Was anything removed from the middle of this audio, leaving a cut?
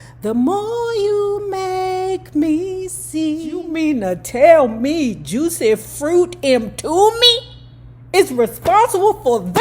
yes; 1 cut; at 3.6 s

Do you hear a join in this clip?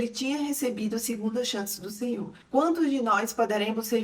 yes; 1 cut; at 2.4 s

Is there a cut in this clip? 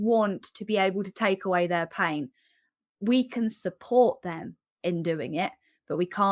no; 0 cuts

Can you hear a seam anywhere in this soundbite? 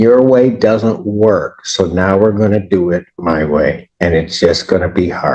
no; 0 cuts

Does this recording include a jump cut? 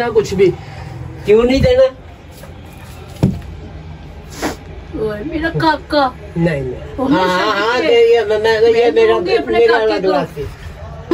no; 0 cuts

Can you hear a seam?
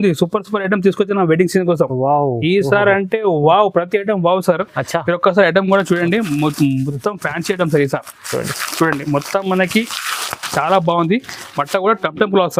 no; 0 cuts

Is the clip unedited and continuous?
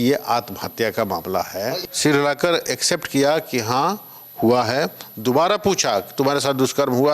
no; 1 cut; at 1.8 s

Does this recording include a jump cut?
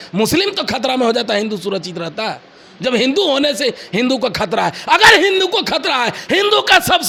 no; 0 cuts

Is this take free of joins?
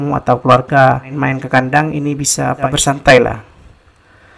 no; 2 cuts; at 1.1 s, 2.7 s

